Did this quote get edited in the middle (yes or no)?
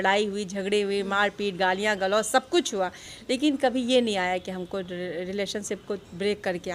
no